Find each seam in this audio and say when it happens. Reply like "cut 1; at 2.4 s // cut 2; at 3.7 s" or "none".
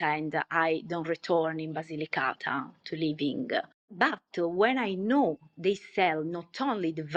none